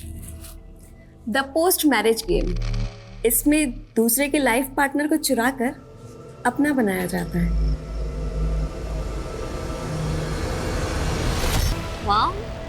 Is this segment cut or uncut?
cut